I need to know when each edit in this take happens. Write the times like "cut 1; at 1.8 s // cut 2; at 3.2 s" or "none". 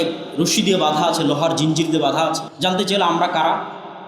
cut 1; at 2.5 s